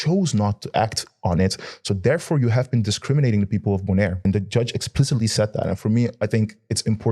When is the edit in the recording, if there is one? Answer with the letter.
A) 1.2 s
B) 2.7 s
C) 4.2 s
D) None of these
C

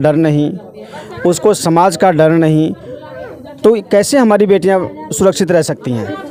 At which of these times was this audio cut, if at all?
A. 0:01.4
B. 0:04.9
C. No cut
C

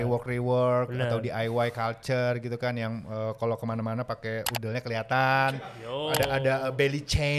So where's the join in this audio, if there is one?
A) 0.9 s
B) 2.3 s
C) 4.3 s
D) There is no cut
D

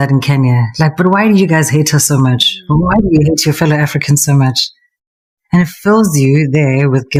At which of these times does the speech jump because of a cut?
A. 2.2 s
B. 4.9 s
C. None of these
C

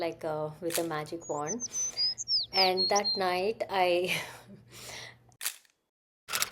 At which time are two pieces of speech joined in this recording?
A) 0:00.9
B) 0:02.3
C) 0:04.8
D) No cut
C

